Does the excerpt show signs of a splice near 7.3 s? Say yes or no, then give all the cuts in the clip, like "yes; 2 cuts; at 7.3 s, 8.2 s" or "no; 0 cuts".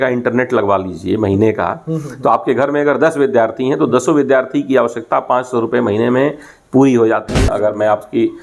yes; 1 cut; at 7.3 s